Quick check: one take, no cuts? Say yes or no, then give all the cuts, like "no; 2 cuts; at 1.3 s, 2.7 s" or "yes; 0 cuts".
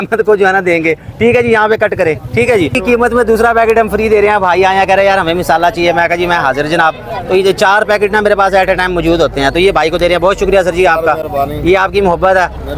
no; 1 cut; at 2.8 s